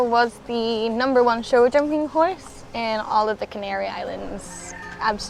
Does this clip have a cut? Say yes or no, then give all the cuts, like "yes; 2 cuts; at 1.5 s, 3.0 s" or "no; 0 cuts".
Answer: no; 0 cuts